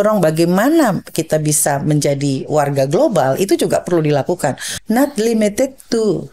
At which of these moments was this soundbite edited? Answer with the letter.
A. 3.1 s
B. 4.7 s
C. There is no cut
B